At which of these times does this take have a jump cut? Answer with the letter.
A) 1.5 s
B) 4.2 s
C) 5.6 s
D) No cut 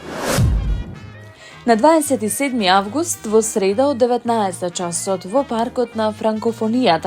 D